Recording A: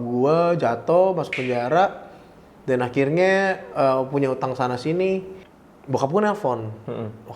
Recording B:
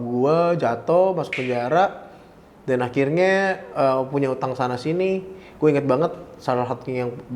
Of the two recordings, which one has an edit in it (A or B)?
A